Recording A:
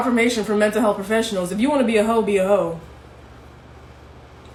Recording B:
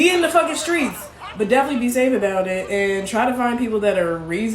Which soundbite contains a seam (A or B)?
B